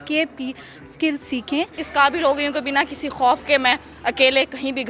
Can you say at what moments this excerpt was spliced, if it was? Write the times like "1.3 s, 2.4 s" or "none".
1.8 s